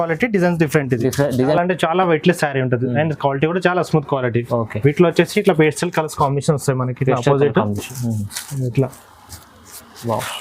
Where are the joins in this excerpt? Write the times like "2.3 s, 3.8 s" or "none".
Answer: 1.5 s